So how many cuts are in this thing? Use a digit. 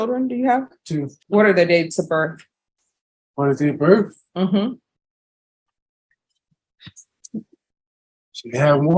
1